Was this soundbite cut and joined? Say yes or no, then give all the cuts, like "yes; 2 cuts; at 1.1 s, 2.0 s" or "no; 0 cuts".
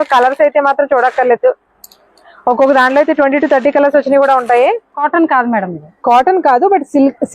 yes; 1 cut; at 4.9 s